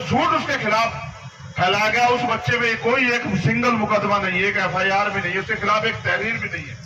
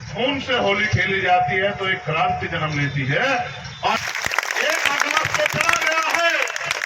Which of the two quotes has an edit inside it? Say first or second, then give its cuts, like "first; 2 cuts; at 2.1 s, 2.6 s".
second; 1 cut; at 4.0 s